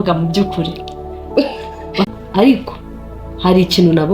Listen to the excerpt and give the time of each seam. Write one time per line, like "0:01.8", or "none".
0:02.1